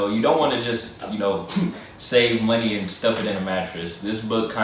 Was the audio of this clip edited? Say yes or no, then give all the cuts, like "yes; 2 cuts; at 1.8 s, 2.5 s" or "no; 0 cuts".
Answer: no; 0 cuts